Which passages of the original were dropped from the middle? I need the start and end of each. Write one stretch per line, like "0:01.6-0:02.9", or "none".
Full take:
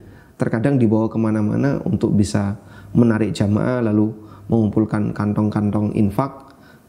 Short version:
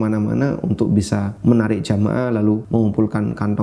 0:02.5-0:02.8
0:04.1-0:04.4